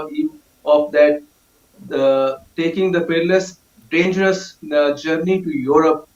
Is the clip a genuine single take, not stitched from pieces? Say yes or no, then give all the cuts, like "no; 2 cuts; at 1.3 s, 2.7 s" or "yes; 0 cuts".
yes; 0 cuts